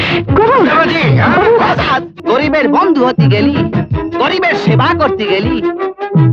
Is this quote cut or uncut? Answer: cut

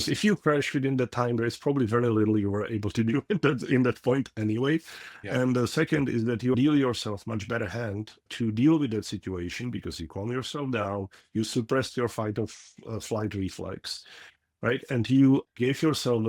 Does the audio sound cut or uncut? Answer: cut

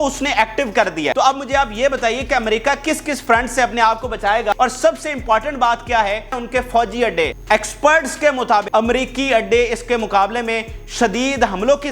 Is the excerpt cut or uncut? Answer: cut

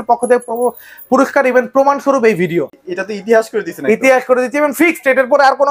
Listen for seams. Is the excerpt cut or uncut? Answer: cut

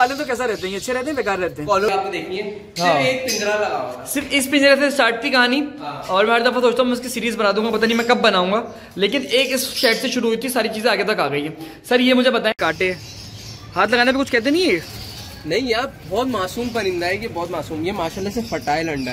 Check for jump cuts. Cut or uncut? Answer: cut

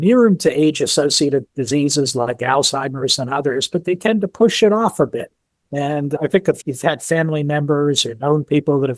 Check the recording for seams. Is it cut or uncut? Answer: uncut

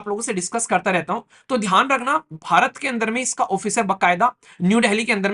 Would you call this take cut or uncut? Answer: uncut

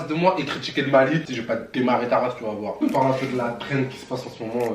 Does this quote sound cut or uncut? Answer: cut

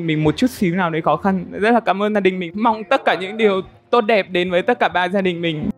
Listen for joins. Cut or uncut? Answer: uncut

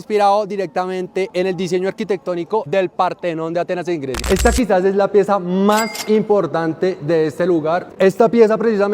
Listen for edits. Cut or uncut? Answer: cut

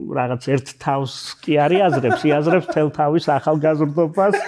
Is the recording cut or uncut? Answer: uncut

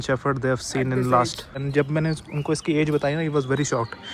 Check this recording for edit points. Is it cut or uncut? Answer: cut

